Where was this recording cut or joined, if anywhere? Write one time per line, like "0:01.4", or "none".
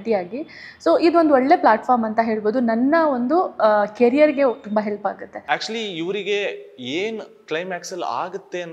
0:05.3